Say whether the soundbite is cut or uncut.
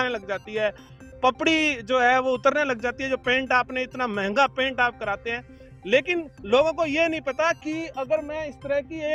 uncut